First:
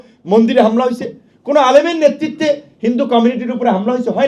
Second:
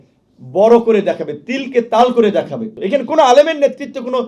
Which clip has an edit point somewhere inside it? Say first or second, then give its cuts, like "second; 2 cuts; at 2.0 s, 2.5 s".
second; 1 cut; at 2.8 s